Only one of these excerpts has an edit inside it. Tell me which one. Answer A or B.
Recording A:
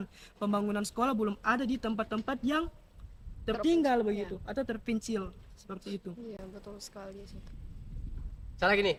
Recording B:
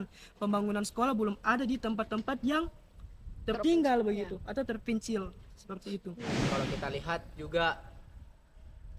B